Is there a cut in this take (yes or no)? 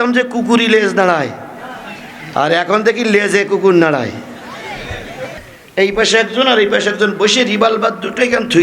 yes